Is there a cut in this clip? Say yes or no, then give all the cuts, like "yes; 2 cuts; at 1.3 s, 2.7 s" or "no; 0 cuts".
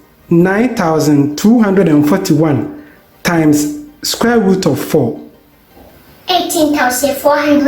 no; 0 cuts